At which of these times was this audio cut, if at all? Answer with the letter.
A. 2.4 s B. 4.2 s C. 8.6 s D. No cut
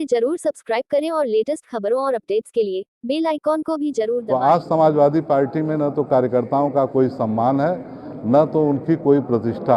B